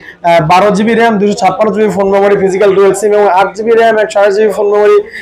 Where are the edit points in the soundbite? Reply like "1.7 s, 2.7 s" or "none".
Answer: none